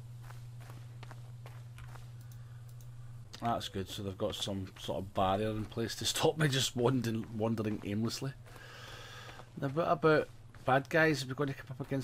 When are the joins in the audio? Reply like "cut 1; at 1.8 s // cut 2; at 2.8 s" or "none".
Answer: cut 1; at 3.3 s